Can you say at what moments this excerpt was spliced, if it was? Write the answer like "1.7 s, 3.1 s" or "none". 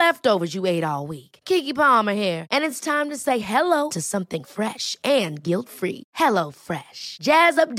none